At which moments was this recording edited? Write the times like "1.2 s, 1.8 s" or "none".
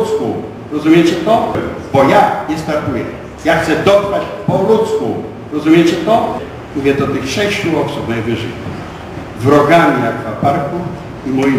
1.6 s, 6.5 s